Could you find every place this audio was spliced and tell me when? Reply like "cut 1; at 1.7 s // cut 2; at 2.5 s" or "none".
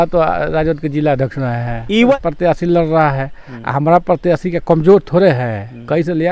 cut 1; at 2.1 s